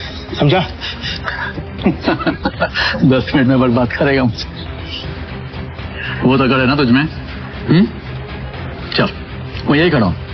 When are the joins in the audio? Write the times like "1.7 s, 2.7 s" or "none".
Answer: none